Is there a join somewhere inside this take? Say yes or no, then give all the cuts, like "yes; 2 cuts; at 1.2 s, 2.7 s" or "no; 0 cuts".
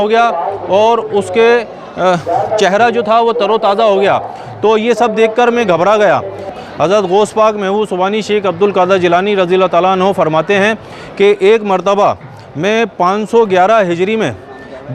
yes; 1 cut; at 6.6 s